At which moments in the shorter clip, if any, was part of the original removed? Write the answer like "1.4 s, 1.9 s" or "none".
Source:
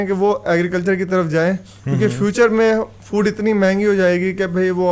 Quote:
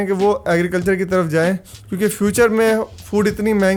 none